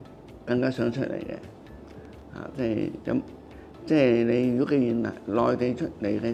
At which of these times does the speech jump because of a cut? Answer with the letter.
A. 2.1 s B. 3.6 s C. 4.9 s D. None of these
D